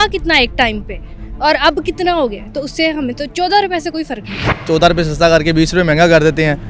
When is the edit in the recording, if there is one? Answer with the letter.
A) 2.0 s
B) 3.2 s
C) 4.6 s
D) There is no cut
C